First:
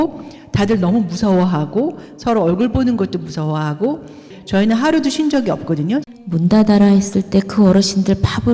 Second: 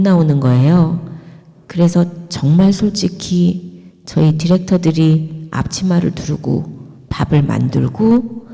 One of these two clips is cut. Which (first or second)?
first